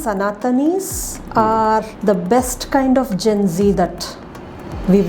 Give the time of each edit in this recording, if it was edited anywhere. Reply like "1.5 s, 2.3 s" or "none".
1.9 s